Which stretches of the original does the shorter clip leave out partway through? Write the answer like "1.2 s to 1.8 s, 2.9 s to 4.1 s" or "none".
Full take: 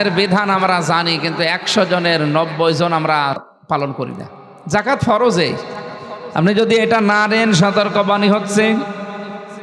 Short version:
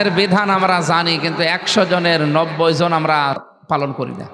none